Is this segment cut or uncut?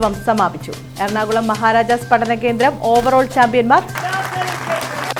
uncut